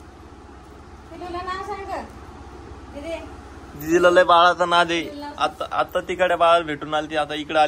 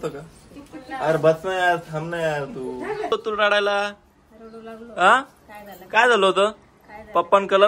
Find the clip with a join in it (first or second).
second